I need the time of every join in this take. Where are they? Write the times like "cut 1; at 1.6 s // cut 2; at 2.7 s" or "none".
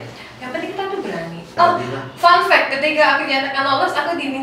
cut 1; at 1.5 s